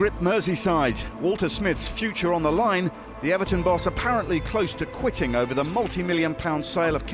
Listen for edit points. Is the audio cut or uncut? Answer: uncut